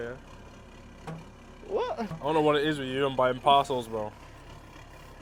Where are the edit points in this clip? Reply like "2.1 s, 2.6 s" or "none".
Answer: none